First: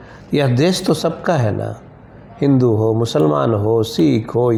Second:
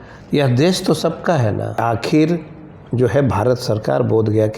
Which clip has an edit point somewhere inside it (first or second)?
second